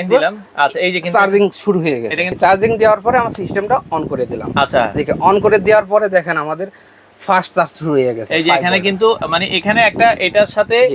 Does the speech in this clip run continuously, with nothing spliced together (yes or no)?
no